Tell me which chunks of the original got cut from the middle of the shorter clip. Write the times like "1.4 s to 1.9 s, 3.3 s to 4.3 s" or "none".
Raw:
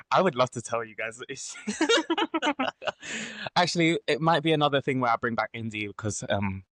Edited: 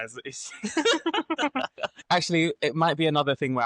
2.9 s to 3.3 s